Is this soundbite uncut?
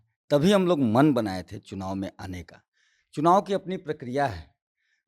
yes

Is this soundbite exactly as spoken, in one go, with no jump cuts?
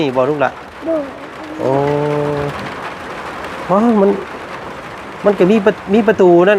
yes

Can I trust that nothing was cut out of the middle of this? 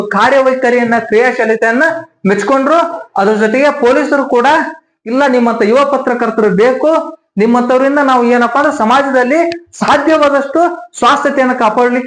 yes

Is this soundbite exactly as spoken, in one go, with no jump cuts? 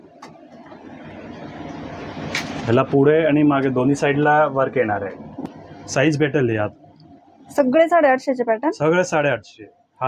no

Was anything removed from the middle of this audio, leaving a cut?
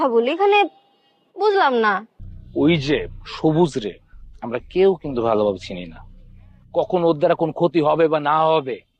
yes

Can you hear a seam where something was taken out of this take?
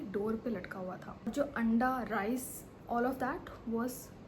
yes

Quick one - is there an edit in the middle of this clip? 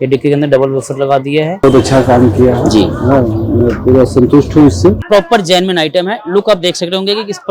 yes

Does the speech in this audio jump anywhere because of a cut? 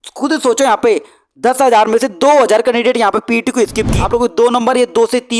yes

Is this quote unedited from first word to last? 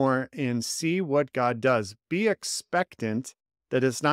yes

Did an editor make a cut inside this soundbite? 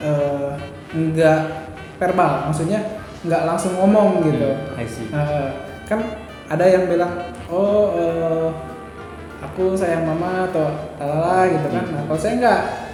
no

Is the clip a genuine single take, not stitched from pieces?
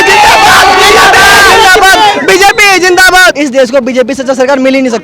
yes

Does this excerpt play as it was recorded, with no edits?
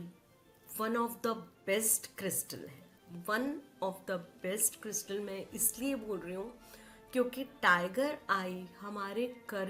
yes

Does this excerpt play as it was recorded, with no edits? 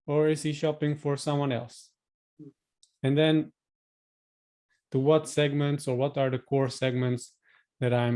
yes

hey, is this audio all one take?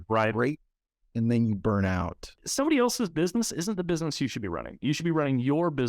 no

